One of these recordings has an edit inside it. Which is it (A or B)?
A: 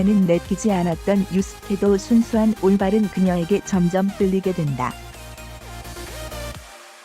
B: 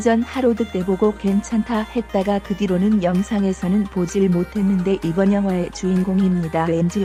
A